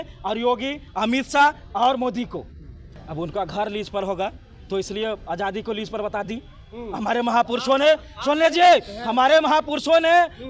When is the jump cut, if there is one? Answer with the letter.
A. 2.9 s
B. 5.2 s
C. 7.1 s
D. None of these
A